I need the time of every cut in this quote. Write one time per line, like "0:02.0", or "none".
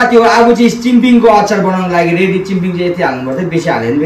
none

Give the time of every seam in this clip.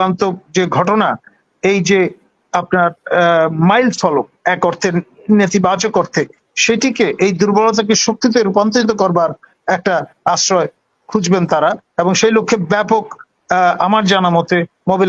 none

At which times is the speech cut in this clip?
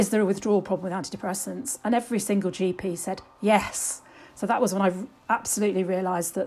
none

